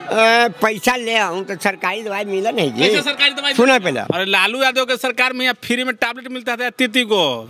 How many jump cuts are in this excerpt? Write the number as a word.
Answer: one